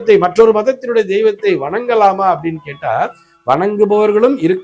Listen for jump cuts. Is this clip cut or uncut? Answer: uncut